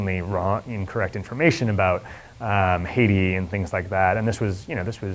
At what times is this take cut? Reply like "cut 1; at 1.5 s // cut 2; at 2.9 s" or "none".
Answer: none